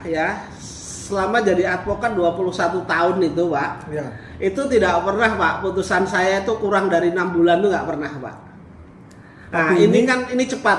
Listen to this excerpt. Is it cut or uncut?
uncut